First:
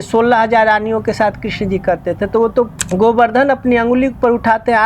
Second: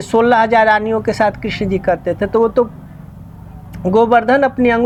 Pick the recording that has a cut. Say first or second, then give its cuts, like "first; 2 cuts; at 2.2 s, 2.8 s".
first; 1 cut; at 2.8 s